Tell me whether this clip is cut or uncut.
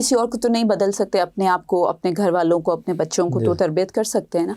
uncut